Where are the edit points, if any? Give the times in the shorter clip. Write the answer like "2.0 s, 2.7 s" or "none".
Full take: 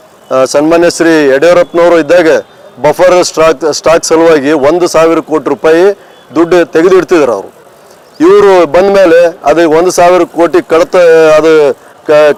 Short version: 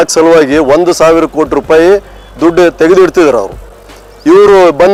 none